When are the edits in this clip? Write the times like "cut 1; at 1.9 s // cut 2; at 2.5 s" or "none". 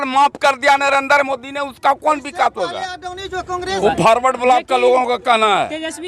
cut 1; at 3.8 s